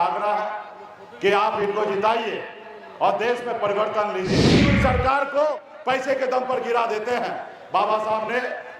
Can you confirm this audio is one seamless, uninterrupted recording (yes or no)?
no